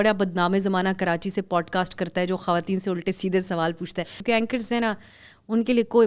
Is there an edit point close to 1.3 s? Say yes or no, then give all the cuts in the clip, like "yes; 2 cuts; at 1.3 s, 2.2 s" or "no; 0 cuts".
no; 1 cut; at 4.2 s